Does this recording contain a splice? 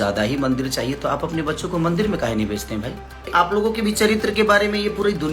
yes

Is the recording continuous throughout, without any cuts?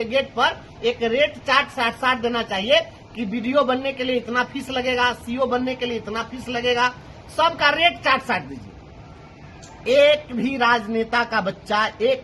yes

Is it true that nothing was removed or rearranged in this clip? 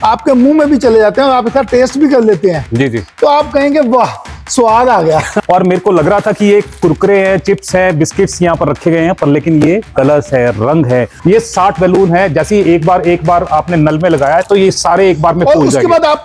no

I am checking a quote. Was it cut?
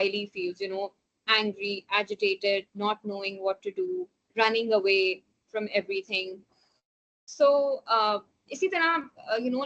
no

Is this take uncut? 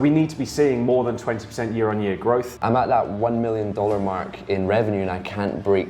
no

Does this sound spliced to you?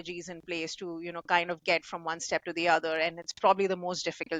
no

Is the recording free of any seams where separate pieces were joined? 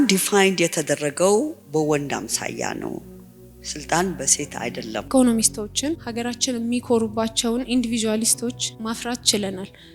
no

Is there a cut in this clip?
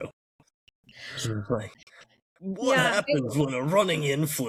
no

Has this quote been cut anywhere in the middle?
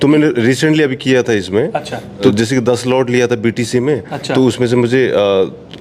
yes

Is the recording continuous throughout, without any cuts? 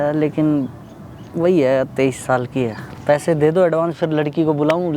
no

